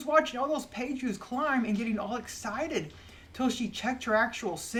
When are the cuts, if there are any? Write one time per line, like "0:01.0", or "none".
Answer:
none